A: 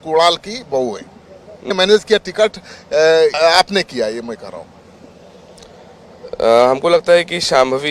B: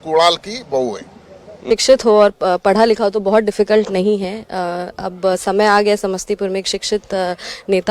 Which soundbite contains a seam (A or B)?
B